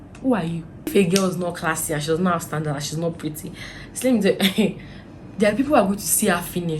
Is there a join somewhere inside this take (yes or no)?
yes